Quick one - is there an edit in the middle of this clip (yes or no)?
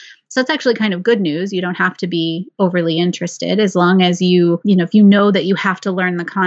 yes